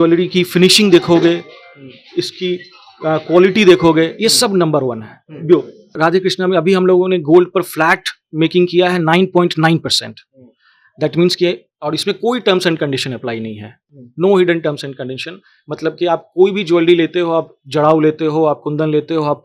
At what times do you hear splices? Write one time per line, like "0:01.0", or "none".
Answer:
0:05.9